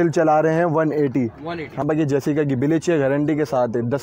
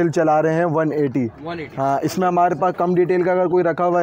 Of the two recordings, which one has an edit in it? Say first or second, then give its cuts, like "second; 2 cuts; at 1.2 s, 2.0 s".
first; 1 cut; at 1.8 s